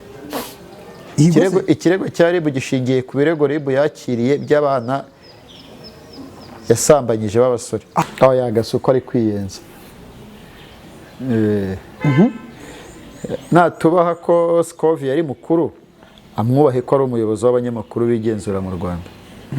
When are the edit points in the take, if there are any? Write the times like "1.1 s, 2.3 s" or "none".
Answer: 8.0 s